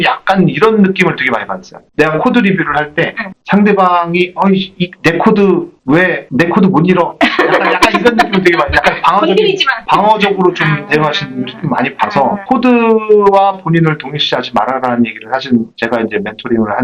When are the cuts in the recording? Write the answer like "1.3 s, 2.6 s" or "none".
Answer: none